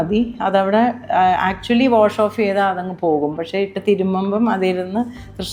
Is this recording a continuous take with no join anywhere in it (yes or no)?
yes